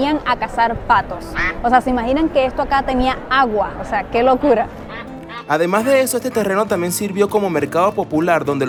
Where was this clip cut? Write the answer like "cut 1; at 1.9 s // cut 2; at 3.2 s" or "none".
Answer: none